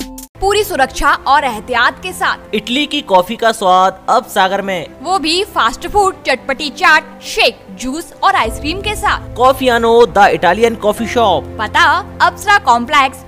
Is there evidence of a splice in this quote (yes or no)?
no